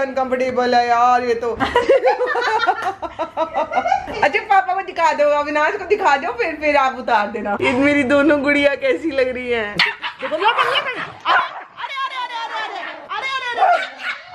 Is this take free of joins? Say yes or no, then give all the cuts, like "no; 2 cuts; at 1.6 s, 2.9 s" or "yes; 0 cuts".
no; 3 cuts; at 1.6 s, 7.6 s, 9.8 s